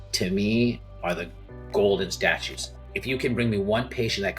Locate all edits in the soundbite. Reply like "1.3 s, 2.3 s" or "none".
2.8 s